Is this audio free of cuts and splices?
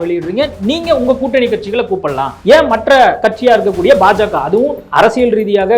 no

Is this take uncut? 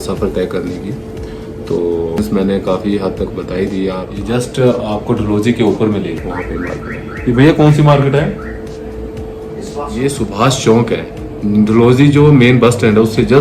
no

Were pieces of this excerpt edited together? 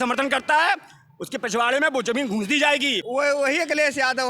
yes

